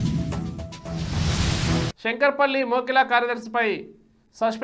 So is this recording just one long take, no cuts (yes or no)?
no